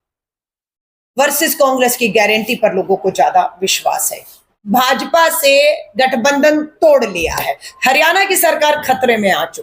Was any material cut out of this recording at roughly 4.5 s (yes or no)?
yes